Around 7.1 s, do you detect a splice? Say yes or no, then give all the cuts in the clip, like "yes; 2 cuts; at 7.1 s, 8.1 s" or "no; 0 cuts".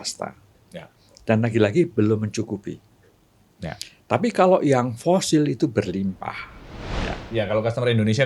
yes; 1 cut; at 7.1 s